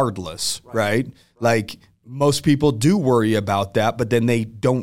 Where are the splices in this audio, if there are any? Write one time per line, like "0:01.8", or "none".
none